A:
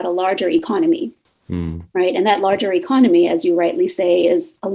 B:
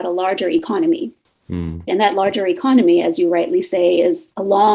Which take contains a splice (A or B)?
B